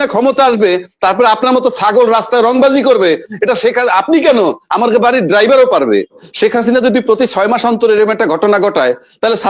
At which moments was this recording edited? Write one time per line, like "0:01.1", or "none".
0:06.2